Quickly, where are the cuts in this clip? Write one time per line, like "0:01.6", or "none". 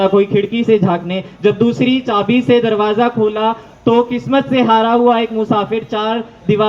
none